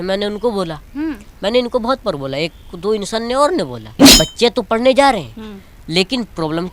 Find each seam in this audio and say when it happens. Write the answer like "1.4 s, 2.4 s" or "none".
4.1 s